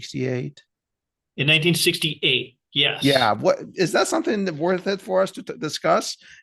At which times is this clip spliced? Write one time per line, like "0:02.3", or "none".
none